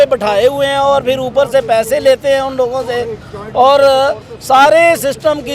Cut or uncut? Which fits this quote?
uncut